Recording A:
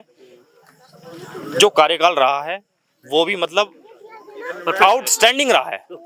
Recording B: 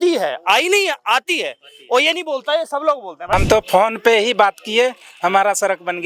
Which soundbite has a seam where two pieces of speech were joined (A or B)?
B